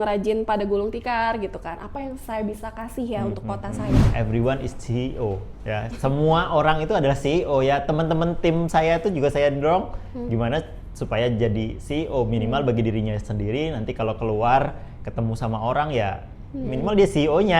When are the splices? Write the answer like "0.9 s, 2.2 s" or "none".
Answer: 4.1 s